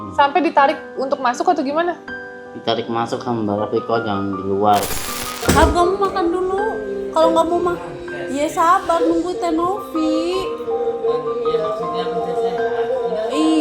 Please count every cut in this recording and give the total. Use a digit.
1